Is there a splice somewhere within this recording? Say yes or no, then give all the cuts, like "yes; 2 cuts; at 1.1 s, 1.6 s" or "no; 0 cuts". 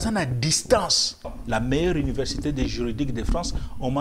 yes; 1 cut; at 1.4 s